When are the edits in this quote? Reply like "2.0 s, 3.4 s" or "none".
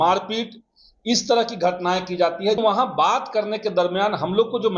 2.6 s